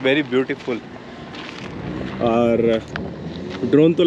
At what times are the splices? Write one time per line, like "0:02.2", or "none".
none